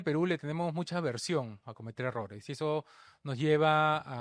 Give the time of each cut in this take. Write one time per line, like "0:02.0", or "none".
none

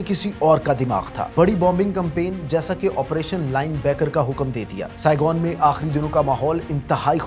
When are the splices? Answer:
0:01.3
0:04.8

